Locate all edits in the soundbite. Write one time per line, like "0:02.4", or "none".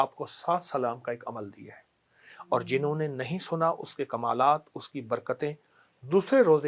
none

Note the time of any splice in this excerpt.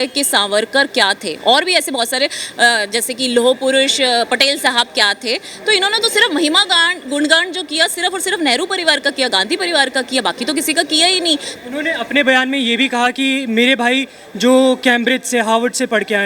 0:11.5

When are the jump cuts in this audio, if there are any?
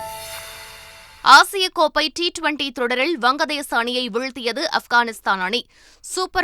0:01.0

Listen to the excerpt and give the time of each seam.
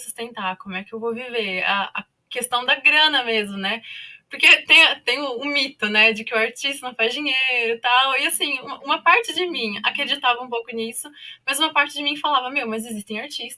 none

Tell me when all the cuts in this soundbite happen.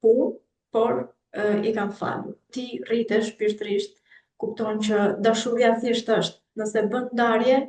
0:02.6

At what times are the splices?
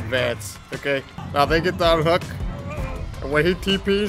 0:01.2

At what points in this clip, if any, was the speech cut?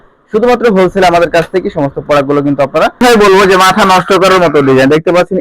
0:03.0

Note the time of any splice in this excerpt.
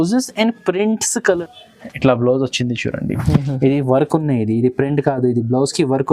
0:01.4

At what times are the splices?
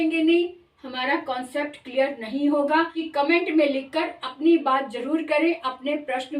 0:03.0

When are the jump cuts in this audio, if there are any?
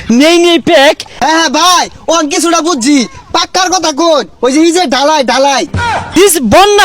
0:01.1
0:06.1

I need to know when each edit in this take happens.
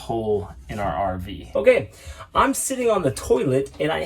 0:01.3

